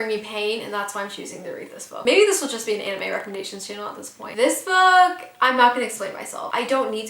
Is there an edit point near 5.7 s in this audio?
no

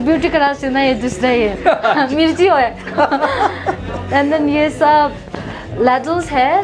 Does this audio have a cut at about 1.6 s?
no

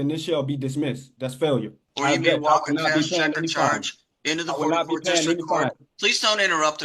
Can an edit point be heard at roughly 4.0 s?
no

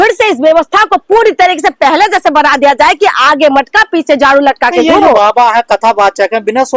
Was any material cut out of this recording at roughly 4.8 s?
no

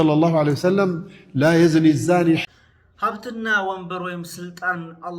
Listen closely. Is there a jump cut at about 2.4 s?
yes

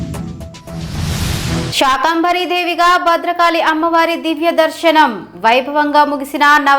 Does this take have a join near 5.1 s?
no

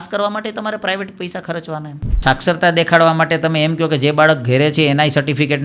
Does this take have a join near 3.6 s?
no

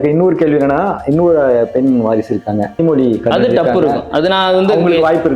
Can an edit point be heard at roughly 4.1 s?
no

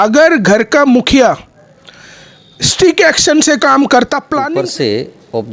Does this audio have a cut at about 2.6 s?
no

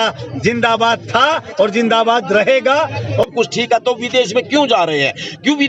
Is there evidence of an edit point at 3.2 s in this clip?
yes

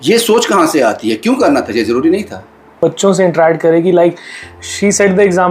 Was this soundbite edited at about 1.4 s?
no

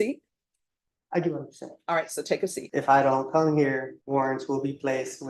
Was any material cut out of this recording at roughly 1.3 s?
no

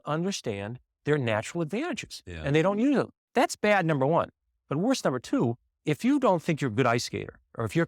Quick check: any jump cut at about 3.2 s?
yes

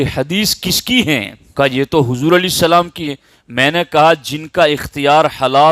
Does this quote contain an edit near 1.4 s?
yes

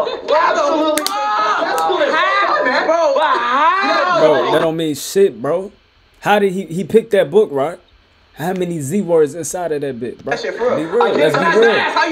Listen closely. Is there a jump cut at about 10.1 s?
no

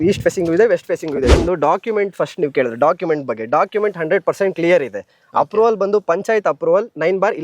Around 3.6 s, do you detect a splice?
no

